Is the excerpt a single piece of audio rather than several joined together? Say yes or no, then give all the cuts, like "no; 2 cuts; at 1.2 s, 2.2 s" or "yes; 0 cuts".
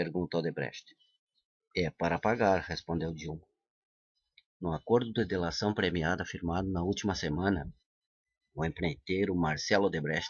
no; 1 cut; at 0.9 s